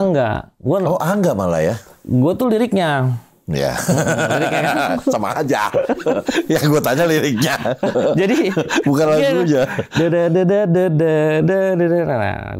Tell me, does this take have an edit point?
no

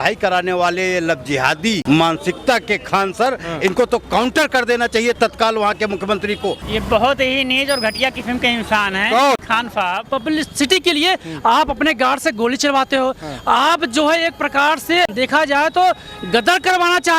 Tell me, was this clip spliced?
yes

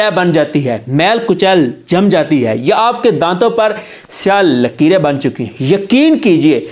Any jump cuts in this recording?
no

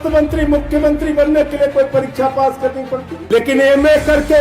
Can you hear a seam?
yes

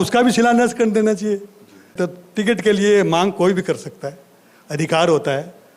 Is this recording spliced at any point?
yes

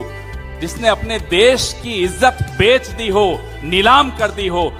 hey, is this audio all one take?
yes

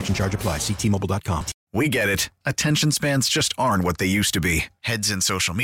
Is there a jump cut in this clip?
yes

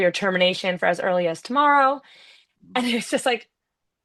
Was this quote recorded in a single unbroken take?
yes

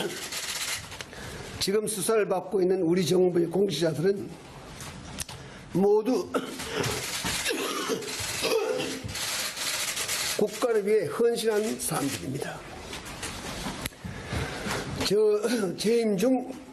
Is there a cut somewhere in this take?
no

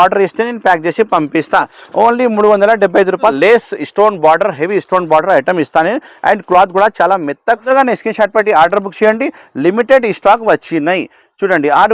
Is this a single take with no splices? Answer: no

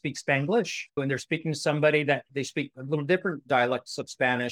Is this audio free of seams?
no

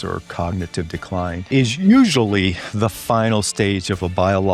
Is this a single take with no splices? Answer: no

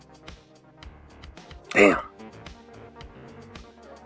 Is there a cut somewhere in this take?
no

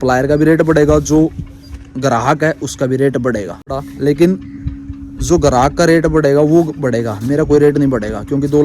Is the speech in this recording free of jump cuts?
no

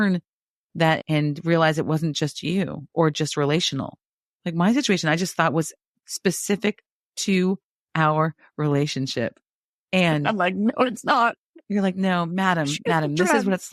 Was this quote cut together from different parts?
yes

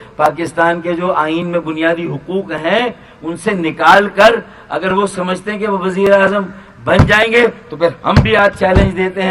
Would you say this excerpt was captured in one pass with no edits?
yes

